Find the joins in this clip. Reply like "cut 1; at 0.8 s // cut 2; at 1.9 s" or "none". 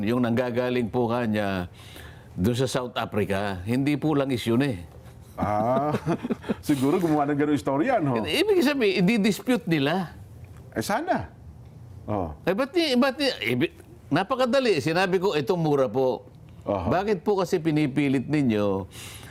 none